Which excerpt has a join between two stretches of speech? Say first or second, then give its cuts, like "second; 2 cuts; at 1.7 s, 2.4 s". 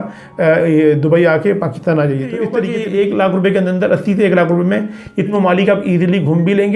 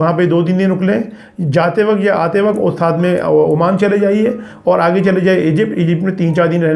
first; 2 cuts; at 2.7 s, 5.3 s